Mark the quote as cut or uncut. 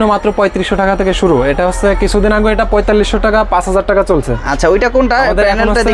uncut